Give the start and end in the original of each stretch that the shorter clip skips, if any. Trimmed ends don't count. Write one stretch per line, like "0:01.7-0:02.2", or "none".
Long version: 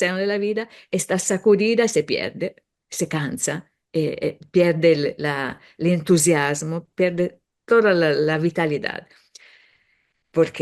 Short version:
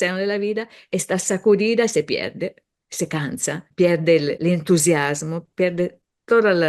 0:03.7-0:04.4
0:05.1-0:05.8